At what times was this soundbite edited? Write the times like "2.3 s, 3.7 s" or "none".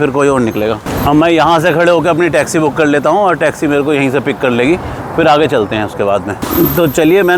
none